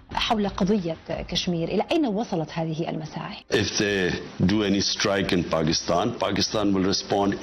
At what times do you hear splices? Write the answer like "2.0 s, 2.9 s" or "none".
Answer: 3.3 s